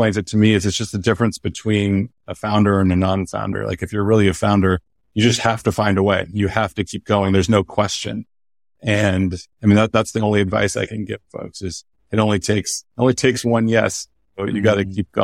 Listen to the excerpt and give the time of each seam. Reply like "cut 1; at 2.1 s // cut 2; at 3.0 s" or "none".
none